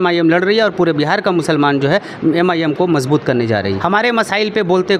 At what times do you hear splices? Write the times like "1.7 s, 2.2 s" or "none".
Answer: 3.8 s